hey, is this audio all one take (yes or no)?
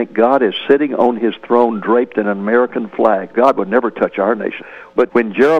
no